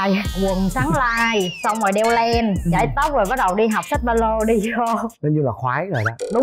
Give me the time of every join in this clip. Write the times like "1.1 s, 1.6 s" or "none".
none